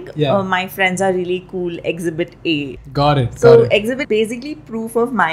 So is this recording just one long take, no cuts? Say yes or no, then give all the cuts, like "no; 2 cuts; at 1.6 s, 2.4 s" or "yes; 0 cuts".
no; 2 cuts; at 2.8 s, 4.0 s